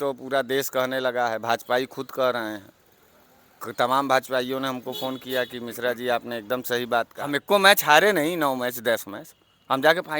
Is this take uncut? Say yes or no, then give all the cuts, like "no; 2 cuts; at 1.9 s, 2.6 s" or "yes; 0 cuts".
no; 1 cut; at 7.2 s